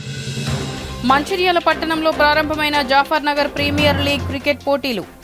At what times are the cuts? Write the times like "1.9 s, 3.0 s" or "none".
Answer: none